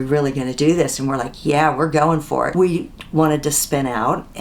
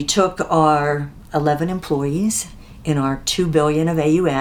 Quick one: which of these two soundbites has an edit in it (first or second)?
first